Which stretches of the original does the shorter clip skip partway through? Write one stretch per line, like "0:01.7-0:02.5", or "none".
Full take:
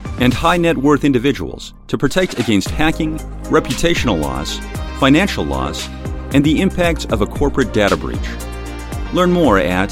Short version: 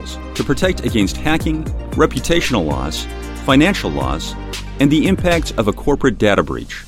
none